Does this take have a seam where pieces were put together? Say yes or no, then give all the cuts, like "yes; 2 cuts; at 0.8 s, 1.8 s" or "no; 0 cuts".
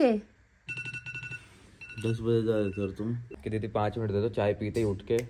yes; 1 cut; at 3.3 s